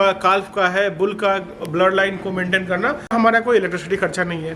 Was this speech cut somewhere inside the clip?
yes; 1 cut; at 3.1 s

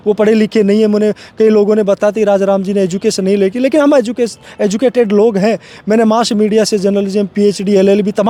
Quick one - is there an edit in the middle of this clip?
no; 0 cuts

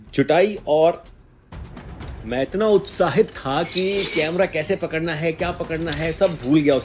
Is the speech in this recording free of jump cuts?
yes; 0 cuts

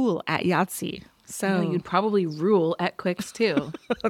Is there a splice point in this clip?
no; 0 cuts

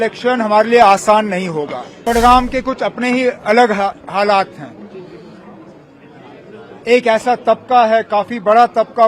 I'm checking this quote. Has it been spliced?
yes; 1 cut; at 1.8 s

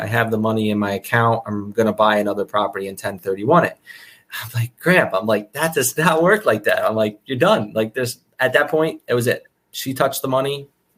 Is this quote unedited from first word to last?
yes; 0 cuts

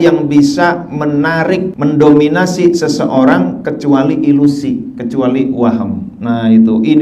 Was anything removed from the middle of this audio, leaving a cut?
yes; 1 cut; at 1.7 s

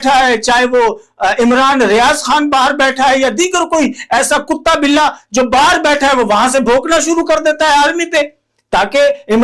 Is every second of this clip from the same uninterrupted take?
yes; 0 cuts

